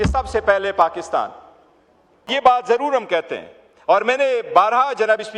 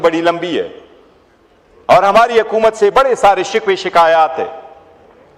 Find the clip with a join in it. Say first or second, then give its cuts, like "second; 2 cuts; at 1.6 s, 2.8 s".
first; 1 cut; at 2.3 s